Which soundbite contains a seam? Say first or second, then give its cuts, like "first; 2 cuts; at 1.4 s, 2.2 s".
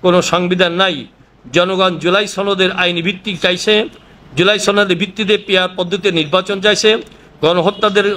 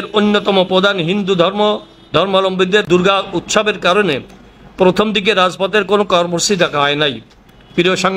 second; 1 cut; at 2.9 s